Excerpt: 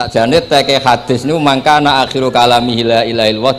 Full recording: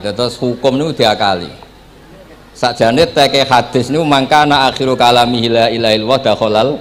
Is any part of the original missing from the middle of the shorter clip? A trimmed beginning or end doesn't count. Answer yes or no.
no